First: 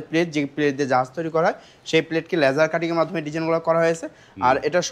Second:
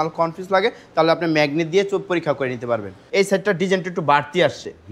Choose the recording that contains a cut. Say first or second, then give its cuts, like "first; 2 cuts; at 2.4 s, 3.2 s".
second; 1 cut; at 3.0 s